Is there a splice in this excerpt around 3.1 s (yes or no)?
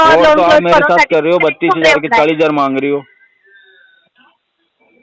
no